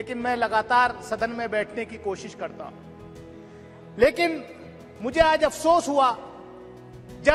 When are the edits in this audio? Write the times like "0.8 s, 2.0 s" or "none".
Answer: none